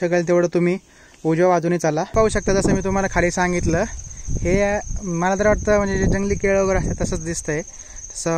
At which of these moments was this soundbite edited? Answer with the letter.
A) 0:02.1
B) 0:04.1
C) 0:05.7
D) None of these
A